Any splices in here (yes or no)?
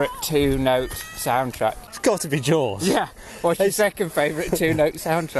yes